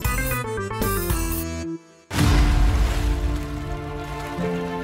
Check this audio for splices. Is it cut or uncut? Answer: cut